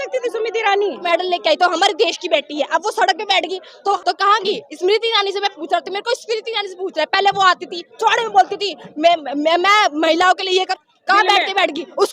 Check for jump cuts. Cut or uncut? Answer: cut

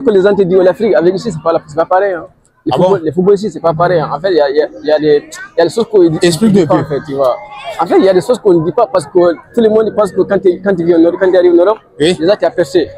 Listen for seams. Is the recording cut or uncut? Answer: uncut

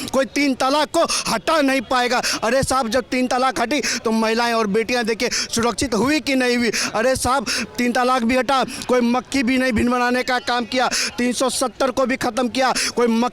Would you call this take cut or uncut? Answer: uncut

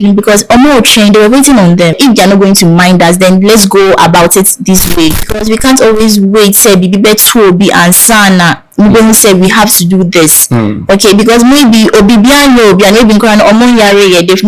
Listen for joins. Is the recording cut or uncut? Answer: cut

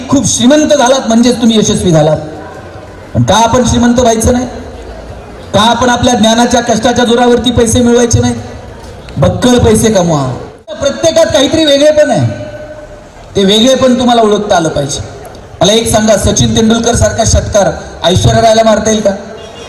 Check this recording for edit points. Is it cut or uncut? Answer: cut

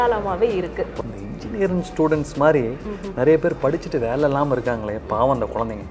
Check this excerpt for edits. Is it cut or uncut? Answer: cut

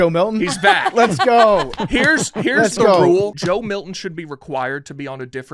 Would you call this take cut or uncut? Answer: cut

